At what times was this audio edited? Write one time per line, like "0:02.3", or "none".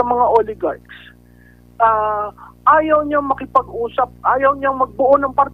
none

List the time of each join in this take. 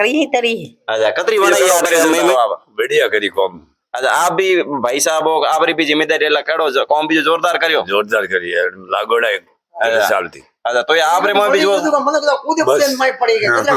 0:02.3

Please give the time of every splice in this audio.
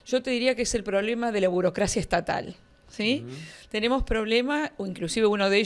none

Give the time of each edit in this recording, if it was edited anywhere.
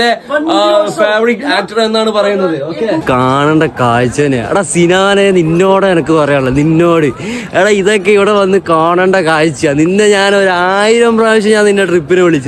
0:03.0

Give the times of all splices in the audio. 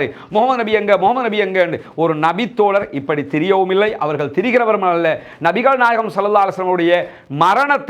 none

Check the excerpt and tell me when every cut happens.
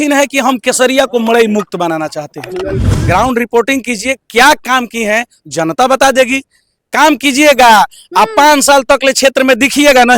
0:02.9

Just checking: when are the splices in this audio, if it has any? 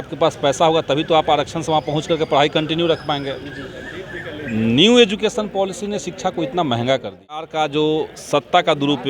0:07.5

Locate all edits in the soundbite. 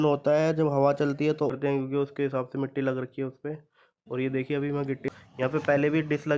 0:01.5
0:05.0

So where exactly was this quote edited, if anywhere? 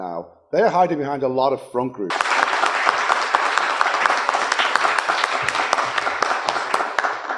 none

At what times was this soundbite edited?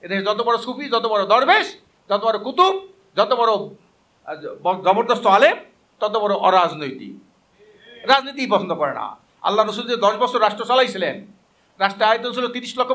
none

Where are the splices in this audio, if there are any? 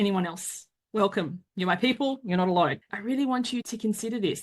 0:02.9

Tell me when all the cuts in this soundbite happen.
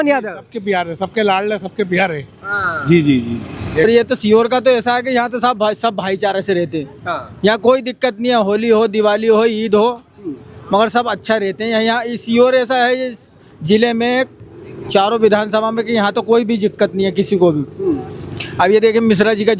0:03.8

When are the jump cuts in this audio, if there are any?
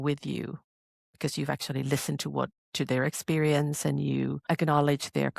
0:04.4

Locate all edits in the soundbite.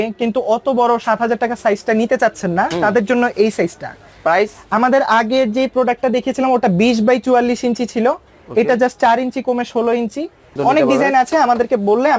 0:10.6

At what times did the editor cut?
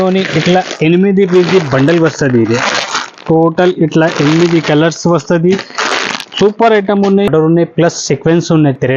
0:07.3

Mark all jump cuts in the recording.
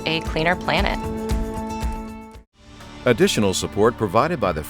0:02.8

